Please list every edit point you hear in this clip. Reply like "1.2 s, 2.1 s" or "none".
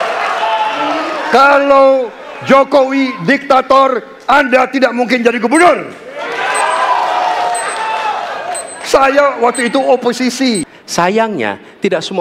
10.7 s